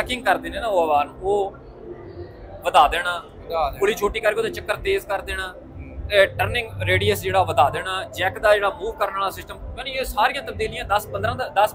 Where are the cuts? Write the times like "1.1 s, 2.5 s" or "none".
none